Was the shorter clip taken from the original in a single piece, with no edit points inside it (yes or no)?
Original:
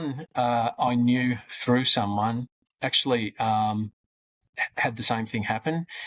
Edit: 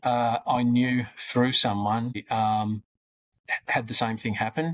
no